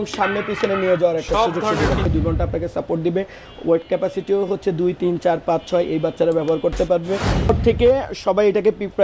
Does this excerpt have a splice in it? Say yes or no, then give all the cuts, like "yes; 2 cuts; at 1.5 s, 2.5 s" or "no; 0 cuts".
yes; 2 cuts; at 2.1 s, 7.5 s